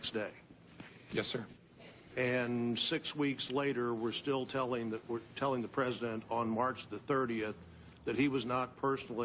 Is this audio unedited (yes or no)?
yes